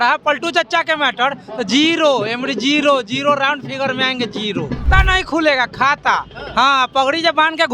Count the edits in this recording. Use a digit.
1